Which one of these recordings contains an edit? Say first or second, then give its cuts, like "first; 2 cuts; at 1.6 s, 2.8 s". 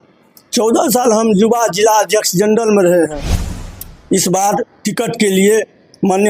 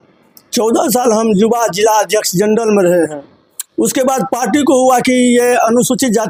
first; 1 cut; at 3.6 s